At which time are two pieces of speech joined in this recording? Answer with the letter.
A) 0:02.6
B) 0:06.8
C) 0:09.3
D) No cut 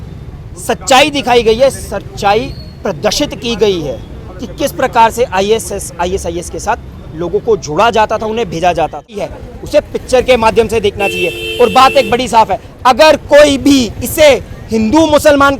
C